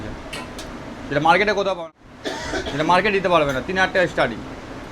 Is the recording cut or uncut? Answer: cut